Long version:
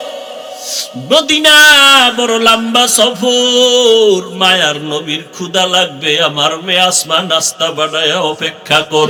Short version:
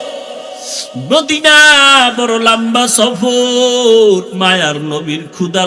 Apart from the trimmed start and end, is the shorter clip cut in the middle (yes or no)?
no